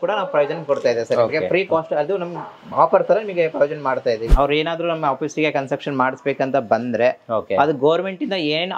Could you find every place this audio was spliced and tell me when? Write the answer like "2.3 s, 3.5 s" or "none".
4.3 s